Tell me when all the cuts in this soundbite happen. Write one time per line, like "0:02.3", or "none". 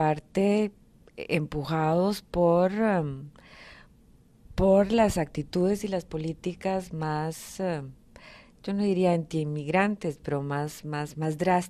0:08.0